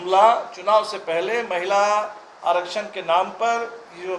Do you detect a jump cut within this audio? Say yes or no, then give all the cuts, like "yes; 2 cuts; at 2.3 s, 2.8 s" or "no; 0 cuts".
no; 0 cuts